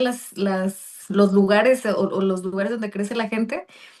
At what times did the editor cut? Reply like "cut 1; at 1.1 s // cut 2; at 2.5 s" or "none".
none